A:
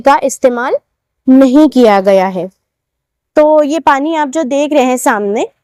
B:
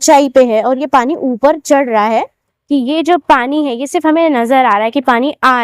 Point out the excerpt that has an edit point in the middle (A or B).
B